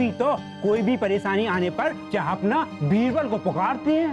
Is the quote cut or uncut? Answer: cut